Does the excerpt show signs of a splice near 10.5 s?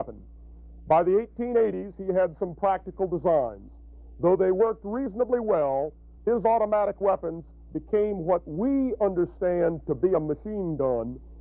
yes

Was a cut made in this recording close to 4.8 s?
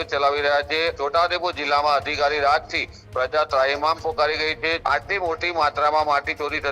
yes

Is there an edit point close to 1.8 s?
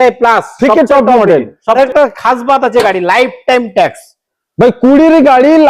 yes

